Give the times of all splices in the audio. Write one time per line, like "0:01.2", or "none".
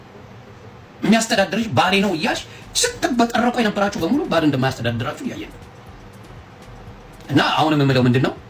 none